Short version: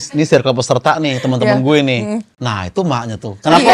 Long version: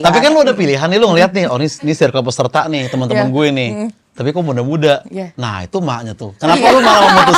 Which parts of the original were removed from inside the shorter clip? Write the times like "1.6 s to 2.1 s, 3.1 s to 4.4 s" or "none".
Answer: 4.1 s to 5.3 s